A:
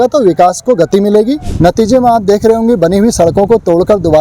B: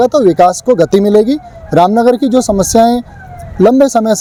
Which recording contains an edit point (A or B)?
A